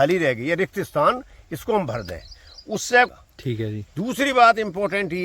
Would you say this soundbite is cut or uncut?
cut